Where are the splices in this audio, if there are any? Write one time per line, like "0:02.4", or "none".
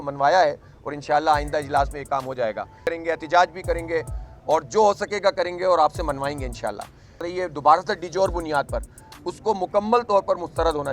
0:02.8
0:07.3